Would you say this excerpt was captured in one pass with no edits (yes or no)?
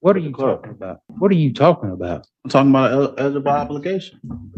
no